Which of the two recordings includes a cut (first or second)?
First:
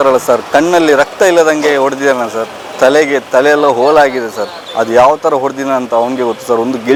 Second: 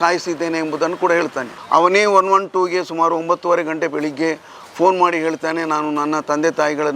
second